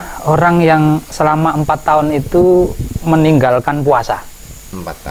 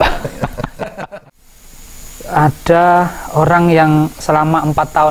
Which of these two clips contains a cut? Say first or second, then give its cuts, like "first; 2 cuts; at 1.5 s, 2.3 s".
second; 1 cut; at 0.9 s